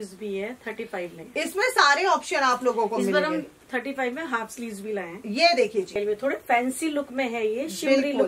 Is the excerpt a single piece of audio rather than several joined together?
no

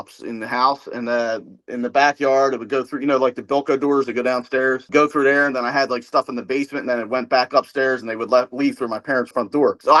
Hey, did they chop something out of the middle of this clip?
no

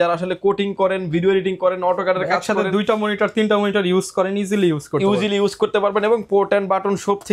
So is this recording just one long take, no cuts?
yes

